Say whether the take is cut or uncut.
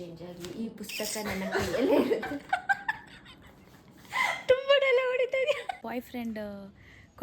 cut